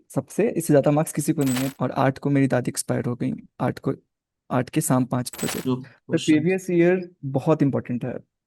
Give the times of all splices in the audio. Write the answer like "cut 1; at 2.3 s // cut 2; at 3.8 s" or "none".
cut 1; at 1.7 s // cut 2; at 5.7 s